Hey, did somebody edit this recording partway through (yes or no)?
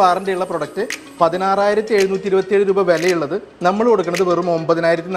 no